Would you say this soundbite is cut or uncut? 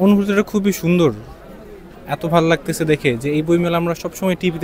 uncut